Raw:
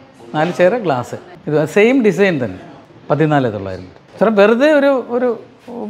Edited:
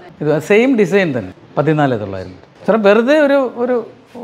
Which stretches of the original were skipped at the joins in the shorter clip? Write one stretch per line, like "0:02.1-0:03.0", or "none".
0:02.6-0:02.9